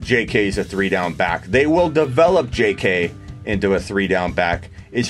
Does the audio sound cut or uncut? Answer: uncut